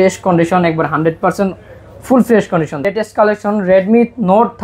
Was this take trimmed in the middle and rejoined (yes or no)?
yes